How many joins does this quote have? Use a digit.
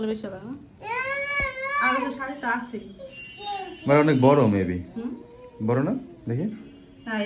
0